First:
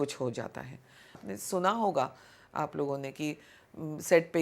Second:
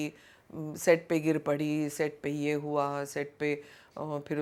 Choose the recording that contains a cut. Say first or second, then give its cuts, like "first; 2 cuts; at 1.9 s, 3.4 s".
first; 1 cut; at 1.2 s